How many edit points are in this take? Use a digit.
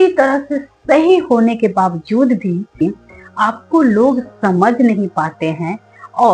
1